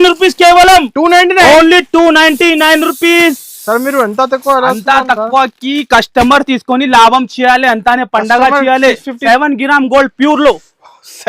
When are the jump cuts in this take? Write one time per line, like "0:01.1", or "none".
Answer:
0:09.1